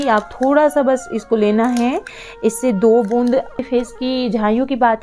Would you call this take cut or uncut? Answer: cut